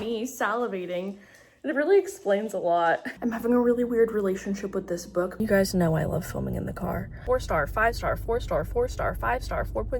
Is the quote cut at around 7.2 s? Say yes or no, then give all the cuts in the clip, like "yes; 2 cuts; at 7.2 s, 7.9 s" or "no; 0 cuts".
yes; 3 cuts; at 3.1 s, 5.3 s, 7.2 s